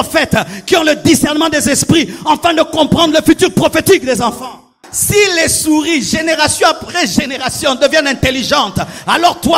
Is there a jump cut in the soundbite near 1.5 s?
no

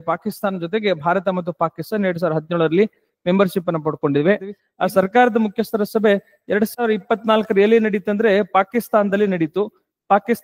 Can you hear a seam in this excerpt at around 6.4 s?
no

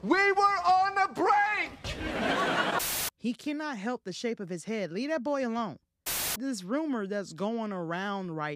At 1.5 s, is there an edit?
no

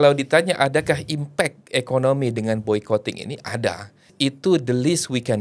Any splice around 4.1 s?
yes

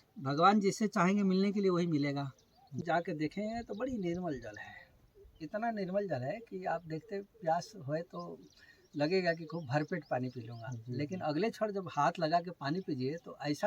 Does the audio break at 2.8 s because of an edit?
yes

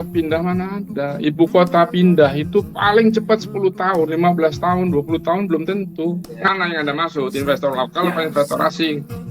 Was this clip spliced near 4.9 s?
no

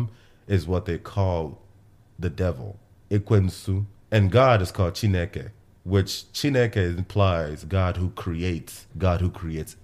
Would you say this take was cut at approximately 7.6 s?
yes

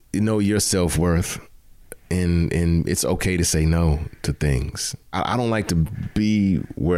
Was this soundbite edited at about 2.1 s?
no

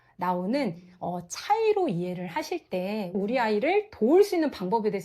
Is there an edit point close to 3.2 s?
yes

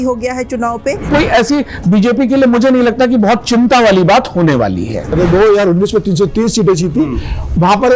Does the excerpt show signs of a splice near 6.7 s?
no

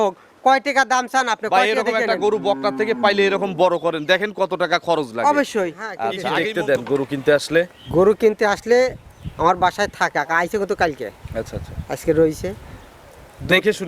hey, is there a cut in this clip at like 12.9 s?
no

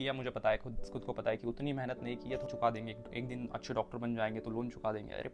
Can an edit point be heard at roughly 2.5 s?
yes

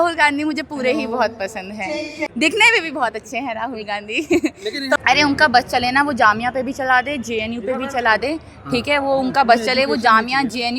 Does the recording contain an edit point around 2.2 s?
yes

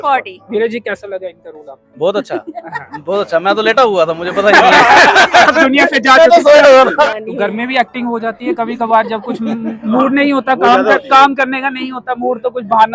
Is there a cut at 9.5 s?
no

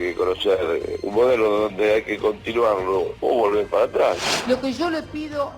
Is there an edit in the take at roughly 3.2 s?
yes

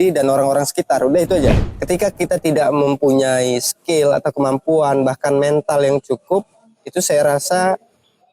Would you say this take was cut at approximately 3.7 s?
no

